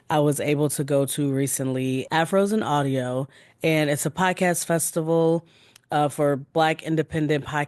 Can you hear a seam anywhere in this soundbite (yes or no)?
yes